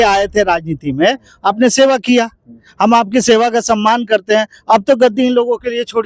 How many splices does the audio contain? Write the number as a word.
zero